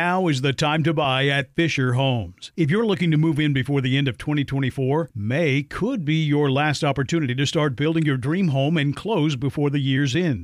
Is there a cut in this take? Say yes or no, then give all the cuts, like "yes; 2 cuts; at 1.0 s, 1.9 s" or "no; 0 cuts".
no; 0 cuts